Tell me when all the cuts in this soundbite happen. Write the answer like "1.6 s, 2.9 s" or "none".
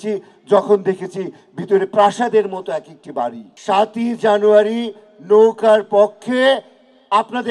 3.5 s